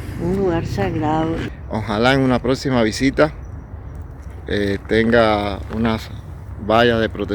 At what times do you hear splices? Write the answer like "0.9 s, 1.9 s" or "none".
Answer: 1.4 s

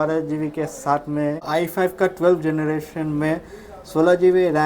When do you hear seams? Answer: 1.5 s

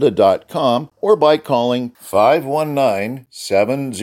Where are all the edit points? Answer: 0.9 s

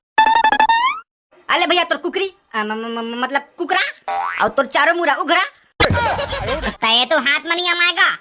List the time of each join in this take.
6.7 s

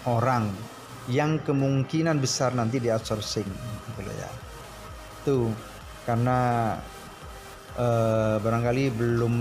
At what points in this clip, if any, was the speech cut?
none

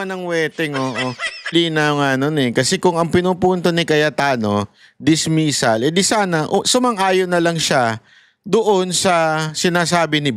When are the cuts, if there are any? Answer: 1.5 s

